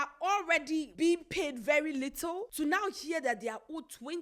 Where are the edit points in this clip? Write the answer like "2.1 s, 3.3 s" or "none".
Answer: 0.9 s, 2.5 s